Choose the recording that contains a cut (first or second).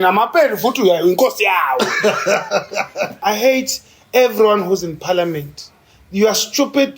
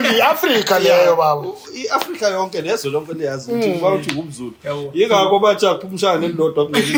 first